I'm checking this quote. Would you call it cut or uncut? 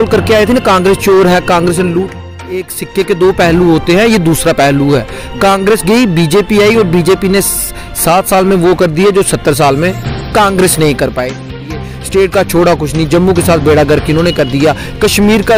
cut